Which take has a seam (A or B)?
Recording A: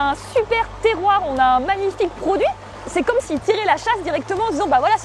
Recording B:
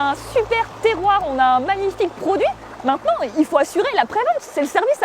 A